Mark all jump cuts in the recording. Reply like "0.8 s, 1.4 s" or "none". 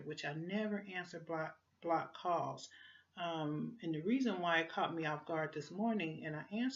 1.7 s